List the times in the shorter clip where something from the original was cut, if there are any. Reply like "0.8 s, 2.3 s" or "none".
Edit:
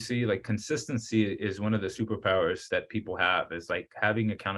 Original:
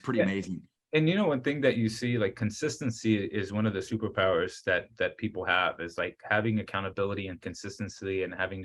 2.6 s